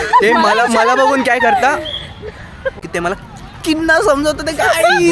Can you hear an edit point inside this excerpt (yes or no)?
yes